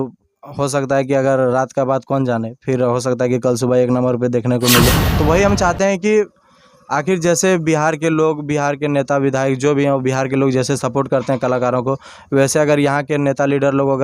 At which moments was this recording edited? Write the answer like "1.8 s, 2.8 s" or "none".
5.1 s